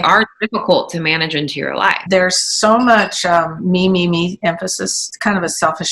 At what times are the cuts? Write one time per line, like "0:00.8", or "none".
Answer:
0:02.0
0:04.9